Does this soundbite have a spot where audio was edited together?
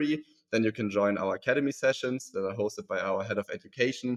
no; 0 cuts

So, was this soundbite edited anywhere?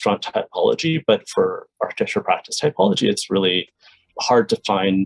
yes; 1 cut; at 4.1 s

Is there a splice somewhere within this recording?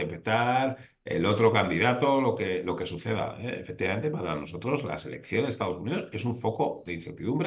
no; 0 cuts

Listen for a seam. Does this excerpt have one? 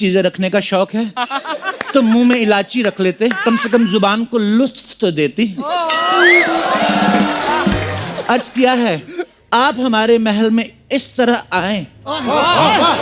no; 0 cuts

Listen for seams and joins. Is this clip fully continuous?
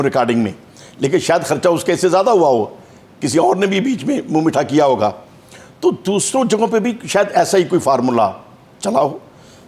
yes; 0 cuts

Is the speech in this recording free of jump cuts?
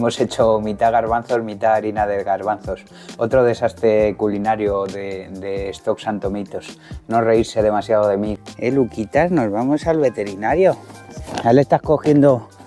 no; 1 cut; at 8.4 s

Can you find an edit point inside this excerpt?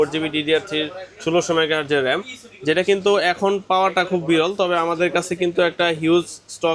no; 0 cuts

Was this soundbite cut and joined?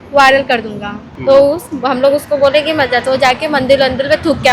yes; 1 cut; at 1.0 s

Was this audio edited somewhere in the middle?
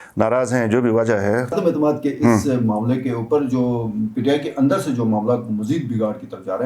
yes; 1 cut; at 1.5 s

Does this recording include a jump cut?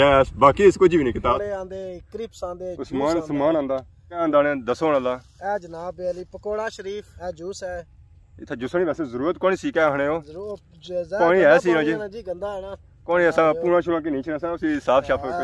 yes; 3 cuts; at 1.4 s, 4.2 s, 7.1 s

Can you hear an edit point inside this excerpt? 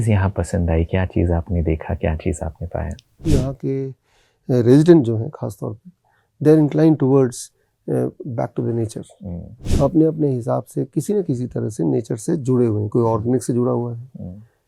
yes; 1 cut; at 3.2 s

